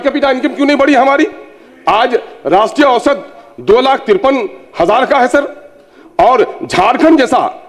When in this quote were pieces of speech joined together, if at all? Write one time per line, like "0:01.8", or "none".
none